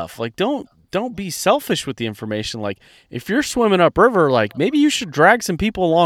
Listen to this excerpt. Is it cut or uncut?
uncut